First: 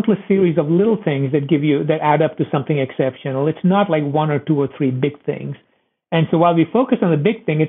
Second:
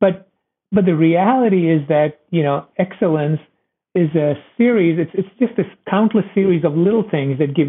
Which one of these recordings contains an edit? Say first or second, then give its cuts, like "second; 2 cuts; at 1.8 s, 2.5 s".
second; 1 cut; at 3.8 s